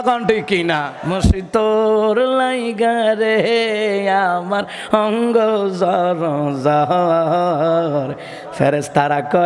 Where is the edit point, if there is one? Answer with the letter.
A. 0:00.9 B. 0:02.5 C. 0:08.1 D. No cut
A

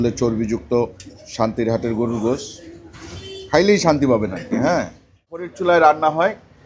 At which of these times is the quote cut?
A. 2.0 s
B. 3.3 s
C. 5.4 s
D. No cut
C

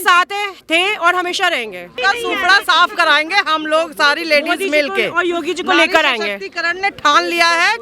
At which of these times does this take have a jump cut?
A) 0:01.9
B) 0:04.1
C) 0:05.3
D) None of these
A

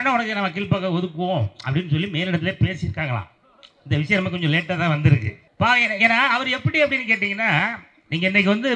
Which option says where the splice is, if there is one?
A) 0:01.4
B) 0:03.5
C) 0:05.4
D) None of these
C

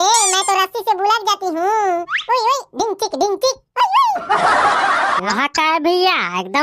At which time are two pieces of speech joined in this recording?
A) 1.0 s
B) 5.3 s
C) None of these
B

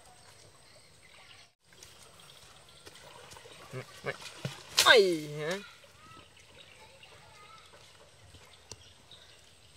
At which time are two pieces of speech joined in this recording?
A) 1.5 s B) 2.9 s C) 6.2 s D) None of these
A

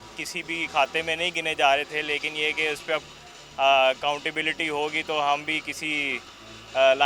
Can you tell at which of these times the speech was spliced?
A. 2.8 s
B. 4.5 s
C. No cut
C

